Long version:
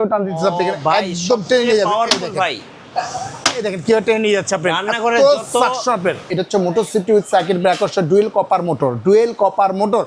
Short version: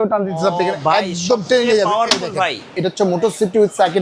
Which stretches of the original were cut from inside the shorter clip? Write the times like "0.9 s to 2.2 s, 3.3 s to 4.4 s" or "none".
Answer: 2.7 s to 6.2 s